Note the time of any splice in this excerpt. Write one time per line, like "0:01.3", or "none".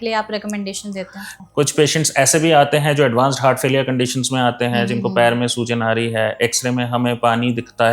0:01.3